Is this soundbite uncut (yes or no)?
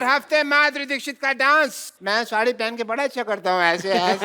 no